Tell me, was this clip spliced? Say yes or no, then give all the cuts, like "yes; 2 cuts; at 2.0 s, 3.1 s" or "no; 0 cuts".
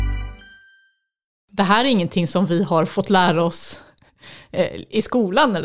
yes; 1 cut; at 1.4 s